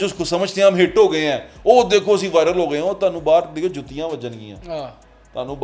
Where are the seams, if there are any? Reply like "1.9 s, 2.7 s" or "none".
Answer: none